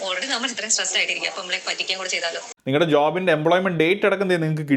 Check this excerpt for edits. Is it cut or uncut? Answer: cut